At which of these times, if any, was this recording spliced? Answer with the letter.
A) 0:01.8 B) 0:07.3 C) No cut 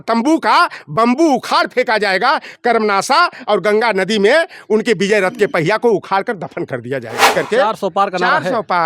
B